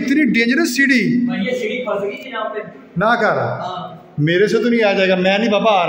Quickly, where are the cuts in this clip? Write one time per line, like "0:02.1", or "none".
none